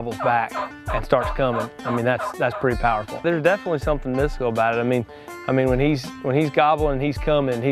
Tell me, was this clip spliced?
yes; 1 cut; at 3.2 s

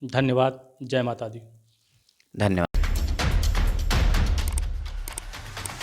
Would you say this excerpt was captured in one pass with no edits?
yes; 0 cuts

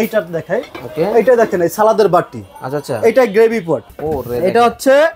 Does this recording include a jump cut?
yes; 1 cut; at 3.9 s

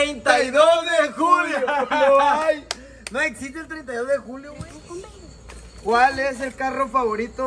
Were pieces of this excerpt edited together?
yes; 1 cut; at 4.5 s

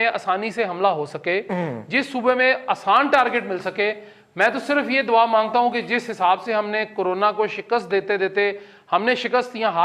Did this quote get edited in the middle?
no; 0 cuts

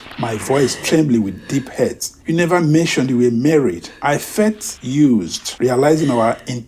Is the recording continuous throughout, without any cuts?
no; 3 cuts; at 2.1 s, 3.9 s, 4.7 s

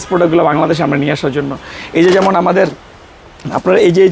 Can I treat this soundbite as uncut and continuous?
yes; 0 cuts

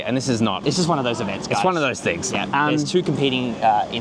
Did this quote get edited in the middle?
no; 0 cuts

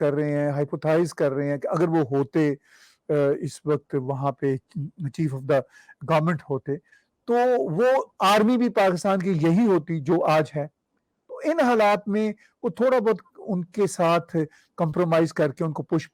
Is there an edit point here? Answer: no; 0 cuts

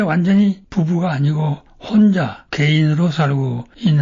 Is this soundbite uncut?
yes; 0 cuts

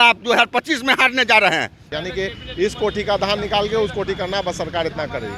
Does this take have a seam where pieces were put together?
yes; 1 cut; at 1.9 s

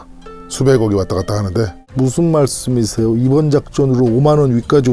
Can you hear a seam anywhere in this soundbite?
yes; 1 cut; at 1.8 s

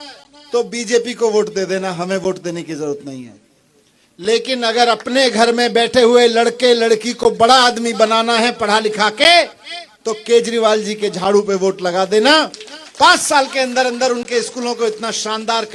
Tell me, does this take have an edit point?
no; 0 cuts

